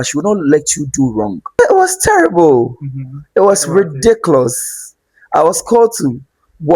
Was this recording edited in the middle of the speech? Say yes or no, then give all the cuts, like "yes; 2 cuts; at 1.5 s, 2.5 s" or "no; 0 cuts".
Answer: yes; 1 cut; at 1.6 s